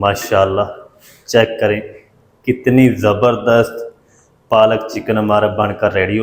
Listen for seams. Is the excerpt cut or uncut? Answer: uncut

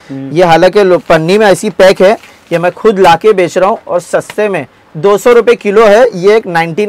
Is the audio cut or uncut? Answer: uncut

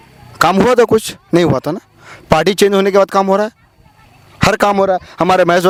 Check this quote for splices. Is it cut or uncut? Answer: uncut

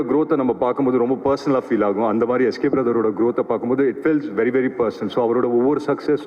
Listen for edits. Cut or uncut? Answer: uncut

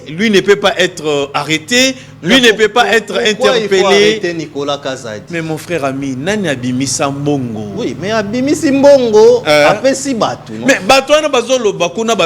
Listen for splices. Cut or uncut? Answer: uncut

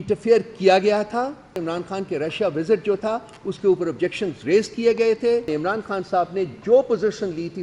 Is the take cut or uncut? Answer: cut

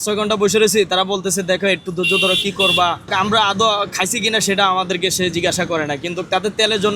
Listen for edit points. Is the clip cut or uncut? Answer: cut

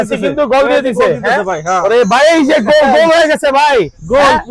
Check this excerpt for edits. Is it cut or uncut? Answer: uncut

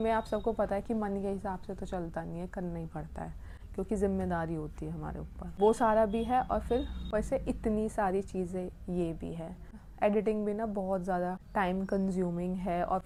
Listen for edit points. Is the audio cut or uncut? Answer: uncut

